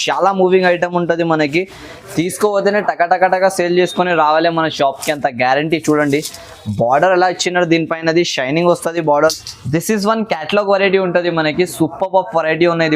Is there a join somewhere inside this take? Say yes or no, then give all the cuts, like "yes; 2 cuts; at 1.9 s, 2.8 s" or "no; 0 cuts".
yes; 1 cut; at 9.1 s